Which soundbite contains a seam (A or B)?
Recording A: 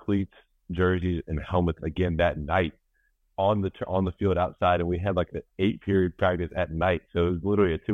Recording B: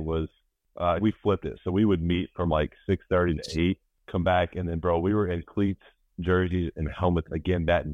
B